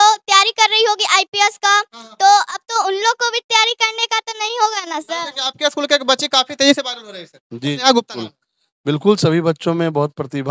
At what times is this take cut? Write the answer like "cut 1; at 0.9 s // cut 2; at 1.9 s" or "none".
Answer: cut 1; at 5.1 s